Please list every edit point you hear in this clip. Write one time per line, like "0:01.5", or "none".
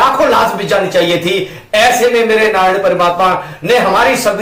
none